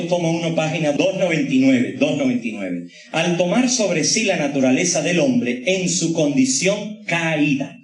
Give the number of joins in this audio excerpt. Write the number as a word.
one